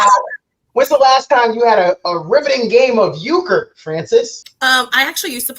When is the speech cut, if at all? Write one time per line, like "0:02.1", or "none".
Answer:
0:04.4